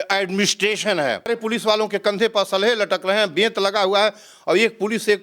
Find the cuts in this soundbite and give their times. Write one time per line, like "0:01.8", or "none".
0:01.3